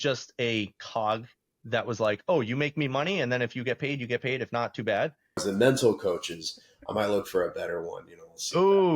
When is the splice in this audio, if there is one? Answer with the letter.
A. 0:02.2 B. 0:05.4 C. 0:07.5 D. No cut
B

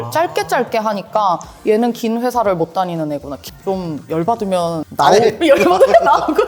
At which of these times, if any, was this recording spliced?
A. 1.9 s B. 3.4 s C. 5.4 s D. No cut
B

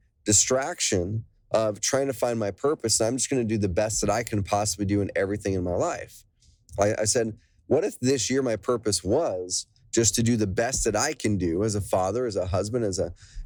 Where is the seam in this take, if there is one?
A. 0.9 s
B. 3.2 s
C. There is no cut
C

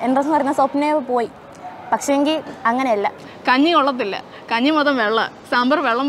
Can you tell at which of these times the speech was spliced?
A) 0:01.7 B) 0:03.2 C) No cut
B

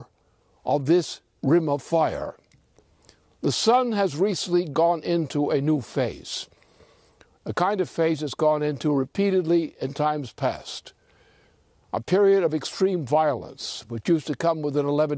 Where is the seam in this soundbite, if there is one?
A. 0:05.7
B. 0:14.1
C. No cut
A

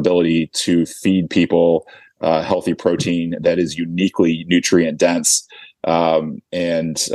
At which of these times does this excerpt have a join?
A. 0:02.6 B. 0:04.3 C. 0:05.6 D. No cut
D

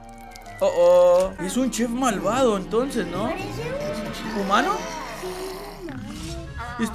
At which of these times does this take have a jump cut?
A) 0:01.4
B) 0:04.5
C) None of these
A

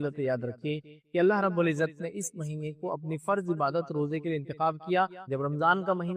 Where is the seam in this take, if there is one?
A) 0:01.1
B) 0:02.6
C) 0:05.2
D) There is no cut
C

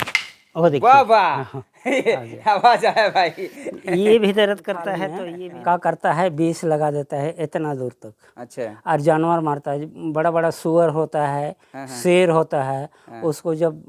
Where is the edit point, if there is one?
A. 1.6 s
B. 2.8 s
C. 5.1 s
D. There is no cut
C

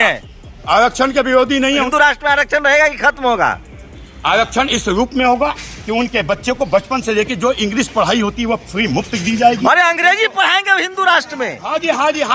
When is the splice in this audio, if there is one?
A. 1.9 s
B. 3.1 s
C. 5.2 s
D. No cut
A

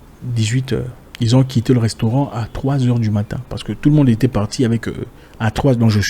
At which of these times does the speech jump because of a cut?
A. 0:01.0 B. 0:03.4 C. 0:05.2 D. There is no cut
A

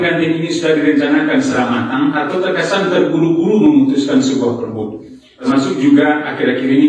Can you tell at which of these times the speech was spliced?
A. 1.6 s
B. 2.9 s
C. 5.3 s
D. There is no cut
C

